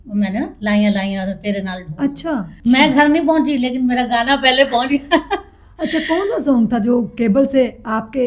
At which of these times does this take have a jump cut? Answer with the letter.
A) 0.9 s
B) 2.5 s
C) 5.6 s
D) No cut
B